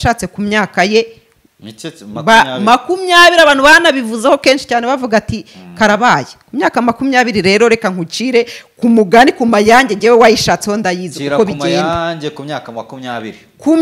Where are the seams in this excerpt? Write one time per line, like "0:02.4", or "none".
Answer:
none